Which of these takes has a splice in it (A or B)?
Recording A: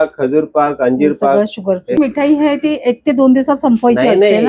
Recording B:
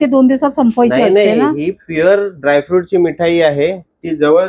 A